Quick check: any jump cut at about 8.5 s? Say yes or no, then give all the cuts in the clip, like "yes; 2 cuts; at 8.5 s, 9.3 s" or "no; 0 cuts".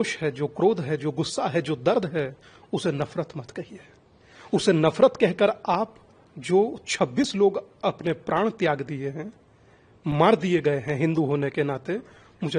no; 0 cuts